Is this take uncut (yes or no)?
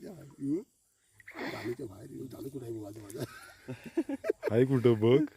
yes